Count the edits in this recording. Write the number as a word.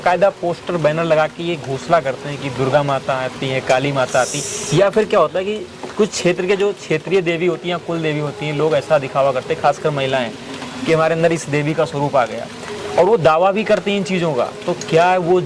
zero